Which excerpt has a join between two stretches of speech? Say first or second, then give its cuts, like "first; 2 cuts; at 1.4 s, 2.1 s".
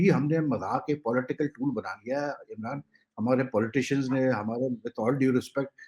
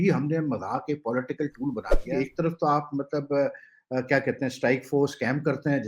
second; 1 cut; at 2.1 s